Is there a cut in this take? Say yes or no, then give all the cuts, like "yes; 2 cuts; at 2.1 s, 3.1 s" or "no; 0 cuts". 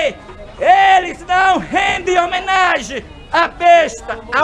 no; 0 cuts